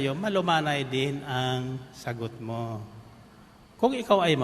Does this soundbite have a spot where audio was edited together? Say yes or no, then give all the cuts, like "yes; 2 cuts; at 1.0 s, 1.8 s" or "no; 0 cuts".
no; 0 cuts